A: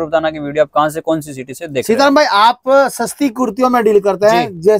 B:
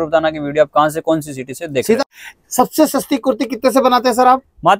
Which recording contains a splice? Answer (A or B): B